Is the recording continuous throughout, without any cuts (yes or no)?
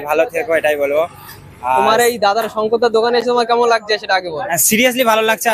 yes